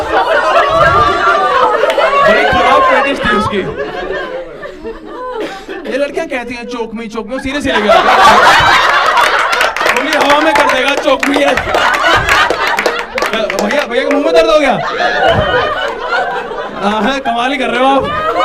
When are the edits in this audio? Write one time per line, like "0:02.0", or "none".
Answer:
none